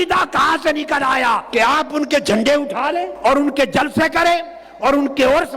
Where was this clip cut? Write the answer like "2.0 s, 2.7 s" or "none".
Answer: 1.4 s, 3.1 s